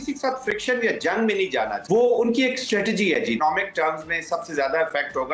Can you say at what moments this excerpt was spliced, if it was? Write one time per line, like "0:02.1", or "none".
0:01.8
0:03.4